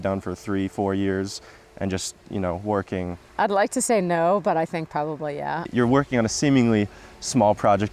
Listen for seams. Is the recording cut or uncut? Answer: cut